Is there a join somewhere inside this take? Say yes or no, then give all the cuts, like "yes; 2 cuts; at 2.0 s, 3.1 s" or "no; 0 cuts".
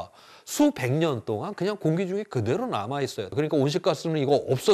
yes; 1 cut; at 3.2 s